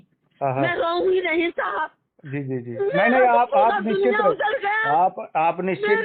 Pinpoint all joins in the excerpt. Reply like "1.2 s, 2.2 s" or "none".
none